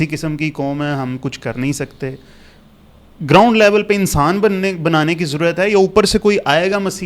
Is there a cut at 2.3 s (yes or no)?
no